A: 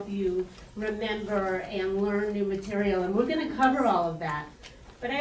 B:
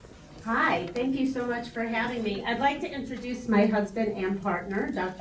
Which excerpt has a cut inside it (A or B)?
B